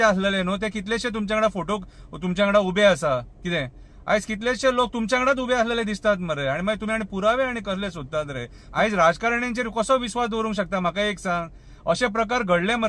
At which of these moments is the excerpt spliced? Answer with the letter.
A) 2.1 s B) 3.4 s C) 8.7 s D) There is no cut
C